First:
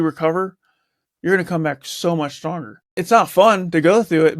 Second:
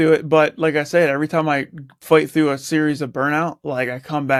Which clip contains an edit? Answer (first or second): first